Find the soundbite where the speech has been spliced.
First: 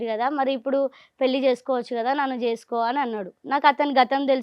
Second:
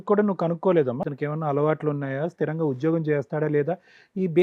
second; 1 cut; at 1.0 s

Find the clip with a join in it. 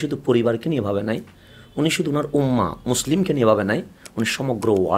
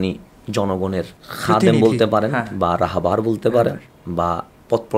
second; 1 cut; at 1.2 s

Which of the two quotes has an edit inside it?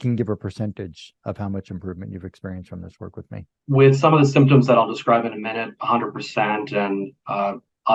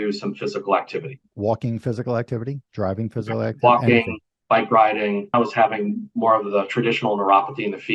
second; 2 cuts; at 1.3 s, 5.3 s

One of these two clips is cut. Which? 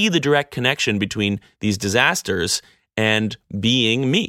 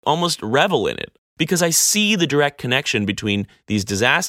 second; 1 cut; at 1.1 s

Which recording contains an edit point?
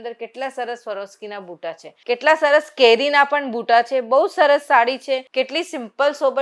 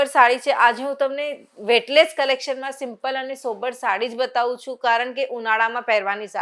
first; 2 cuts; at 1.9 s, 5.3 s

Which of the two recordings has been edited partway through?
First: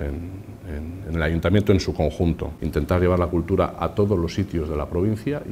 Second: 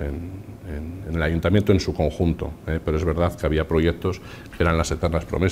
first; 1 cut; at 2.5 s

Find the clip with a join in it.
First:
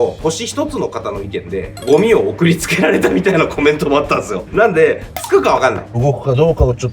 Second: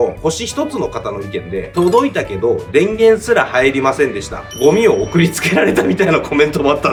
first; 3 cuts; at 1.6 s, 4.5 s, 6.0 s

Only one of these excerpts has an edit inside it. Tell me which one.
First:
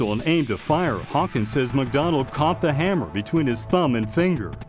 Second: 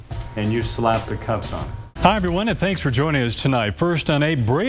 second; 1 cut; at 1.8 s

